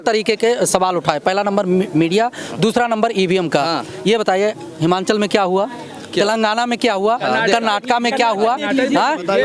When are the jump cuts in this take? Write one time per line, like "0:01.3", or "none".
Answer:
none